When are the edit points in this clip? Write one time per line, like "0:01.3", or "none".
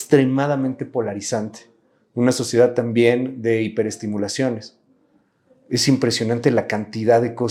none